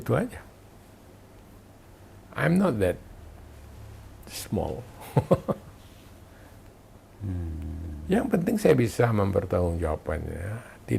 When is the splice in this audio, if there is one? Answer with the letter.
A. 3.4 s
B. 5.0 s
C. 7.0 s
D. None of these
C